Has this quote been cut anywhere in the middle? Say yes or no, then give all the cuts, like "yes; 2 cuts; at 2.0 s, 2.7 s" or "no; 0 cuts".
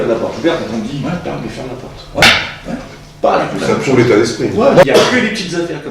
yes; 1 cut; at 4.8 s